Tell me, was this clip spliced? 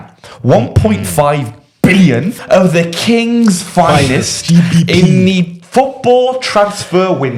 yes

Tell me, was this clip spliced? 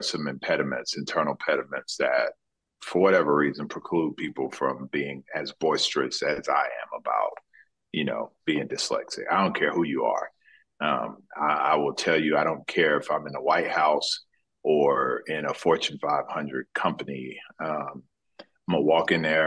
no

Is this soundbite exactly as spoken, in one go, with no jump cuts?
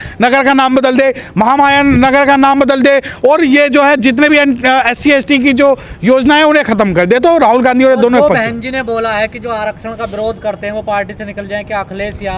yes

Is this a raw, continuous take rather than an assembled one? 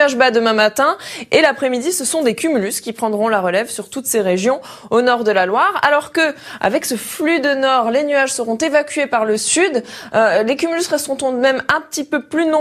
no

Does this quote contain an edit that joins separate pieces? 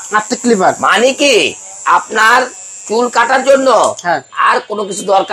no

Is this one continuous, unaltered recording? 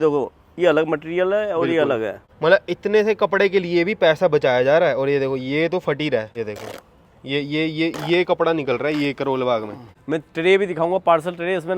no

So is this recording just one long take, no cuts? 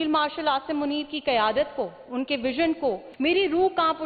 no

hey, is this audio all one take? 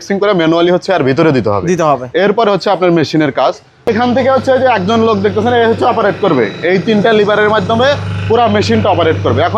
yes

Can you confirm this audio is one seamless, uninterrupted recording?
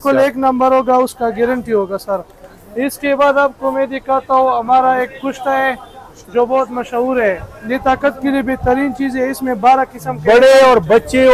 yes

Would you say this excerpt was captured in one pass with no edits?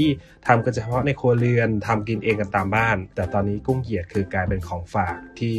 no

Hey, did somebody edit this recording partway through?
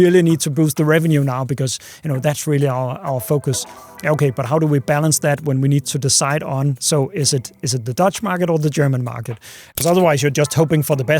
yes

